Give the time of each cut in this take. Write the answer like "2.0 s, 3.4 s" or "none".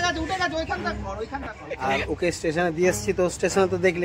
1.6 s